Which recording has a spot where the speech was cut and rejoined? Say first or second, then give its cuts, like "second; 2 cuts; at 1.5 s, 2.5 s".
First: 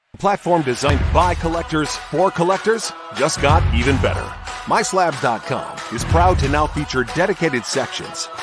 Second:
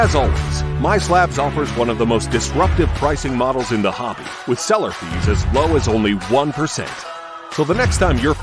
first; 1 cut; at 0.9 s